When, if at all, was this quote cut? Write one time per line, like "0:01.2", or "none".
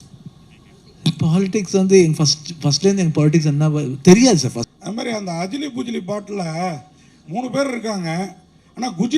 0:04.7

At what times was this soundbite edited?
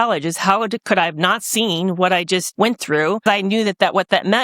0:02.5
0:03.2

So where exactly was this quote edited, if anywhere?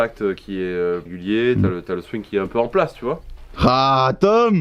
0:01.1

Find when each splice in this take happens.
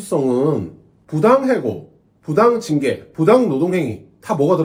none

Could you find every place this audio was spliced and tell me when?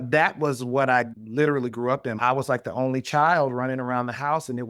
0:01.2
0:02.2

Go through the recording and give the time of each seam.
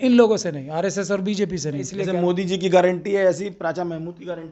0:01.8

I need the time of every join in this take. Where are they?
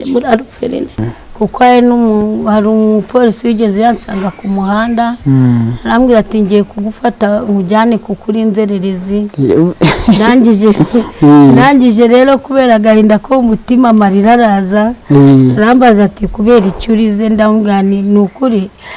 0:01.0

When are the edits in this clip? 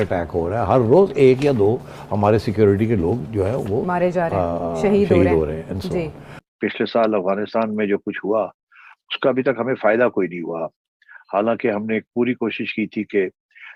0:06.5

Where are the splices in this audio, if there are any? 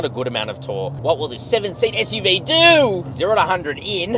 0:01.0
0:03.1

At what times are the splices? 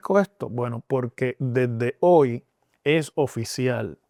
none

